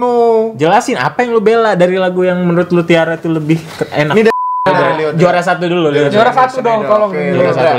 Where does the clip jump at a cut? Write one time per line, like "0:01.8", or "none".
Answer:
0:04.5